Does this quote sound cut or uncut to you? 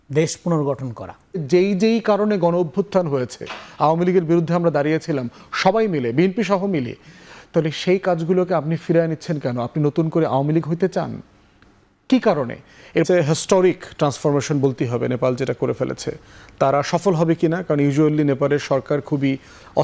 cut